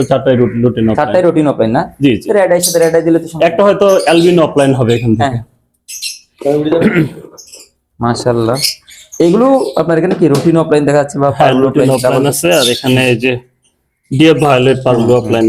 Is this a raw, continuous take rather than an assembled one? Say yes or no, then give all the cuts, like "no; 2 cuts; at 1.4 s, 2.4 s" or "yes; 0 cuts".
yes; 0 cuts